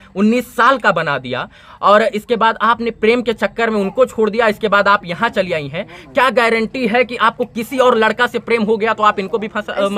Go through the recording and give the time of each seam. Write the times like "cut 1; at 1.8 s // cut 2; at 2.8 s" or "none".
none

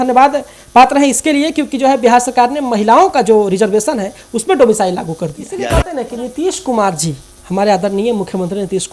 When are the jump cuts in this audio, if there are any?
cut 1; at 5.5 s

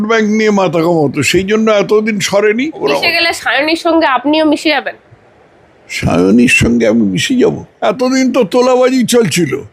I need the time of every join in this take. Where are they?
cut 1; at 2.8 s // cut 2; at 7.7 s

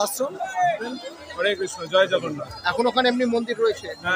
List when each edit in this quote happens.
cut 1; at 0.9 s

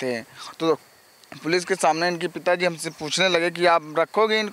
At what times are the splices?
none

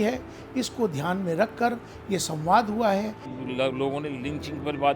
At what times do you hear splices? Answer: cut 1; at 3.3 s

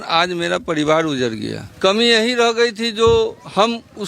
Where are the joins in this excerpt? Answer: cut 1; at 1.6 s

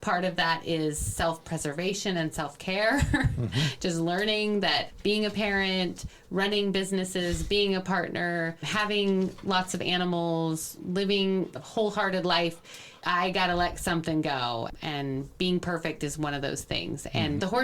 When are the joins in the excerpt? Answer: none

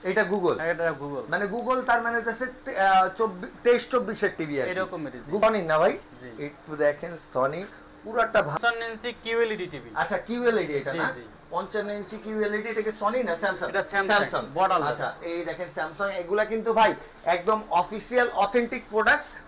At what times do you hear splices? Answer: cut 1; at 5.4 s // cut 2; at 8.5 s

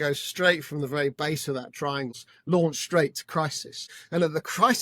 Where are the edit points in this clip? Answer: cut 1; at 2.3 s

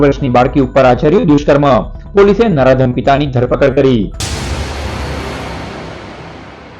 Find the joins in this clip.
cut 1; at 4.4 s

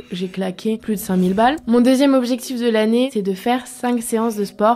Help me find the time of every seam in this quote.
cut 1; at 1.6 s // cut 2; at 3.1 s

